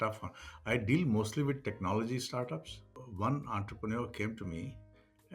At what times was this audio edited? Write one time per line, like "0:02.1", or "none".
0:03.0